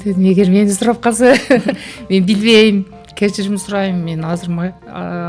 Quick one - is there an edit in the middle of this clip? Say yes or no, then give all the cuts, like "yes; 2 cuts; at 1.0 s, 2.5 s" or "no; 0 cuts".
no; 0 cuts